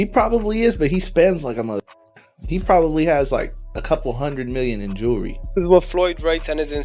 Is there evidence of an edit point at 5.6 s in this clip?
yes; 1 cut; at 5.6 s

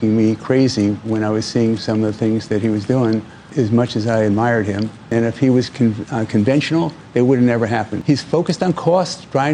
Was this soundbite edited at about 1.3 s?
no; 3 cuts; at 3.4 s, 5.1 s, 7.9 s

